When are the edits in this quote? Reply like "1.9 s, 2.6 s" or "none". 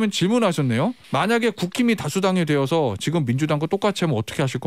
1.0 s